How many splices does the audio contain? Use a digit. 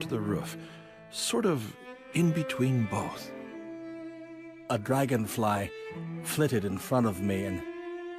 1